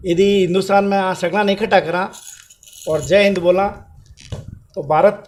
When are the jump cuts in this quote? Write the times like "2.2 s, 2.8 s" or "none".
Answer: none